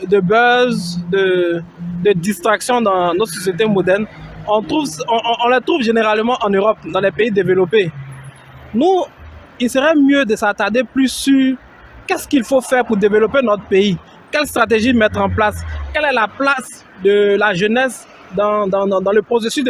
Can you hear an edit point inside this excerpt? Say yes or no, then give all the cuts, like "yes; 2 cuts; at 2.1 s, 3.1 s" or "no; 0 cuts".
no; 0 cuts